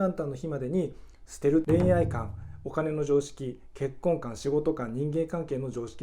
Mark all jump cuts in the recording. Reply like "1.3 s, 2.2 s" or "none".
1.6 s